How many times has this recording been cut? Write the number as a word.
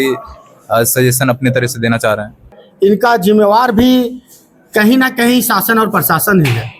one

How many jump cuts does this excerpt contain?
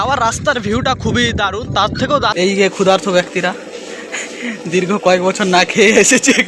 one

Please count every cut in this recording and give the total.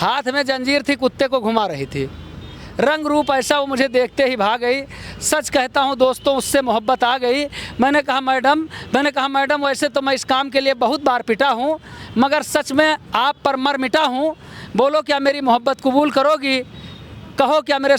zero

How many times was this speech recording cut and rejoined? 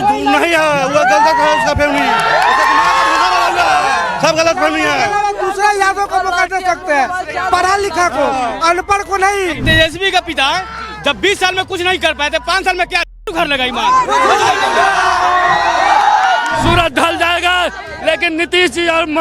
three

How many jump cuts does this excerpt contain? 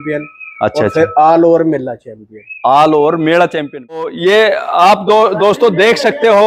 one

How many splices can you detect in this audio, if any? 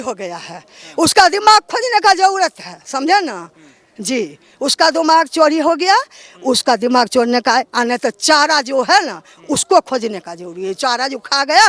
zero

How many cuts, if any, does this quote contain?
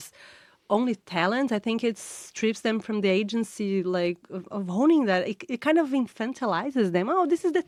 zero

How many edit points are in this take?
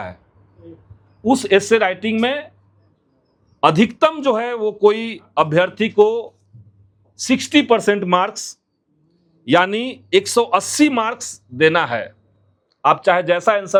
zero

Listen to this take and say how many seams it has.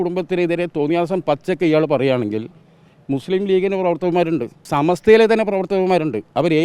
one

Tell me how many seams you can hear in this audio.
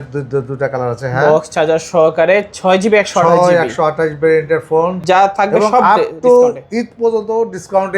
one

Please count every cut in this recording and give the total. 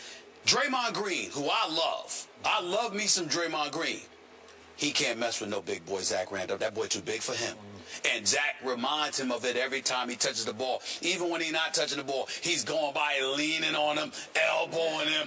one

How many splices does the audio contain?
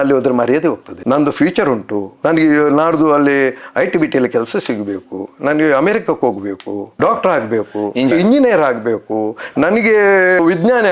two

